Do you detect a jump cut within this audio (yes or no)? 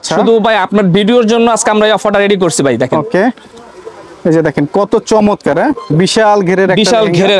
no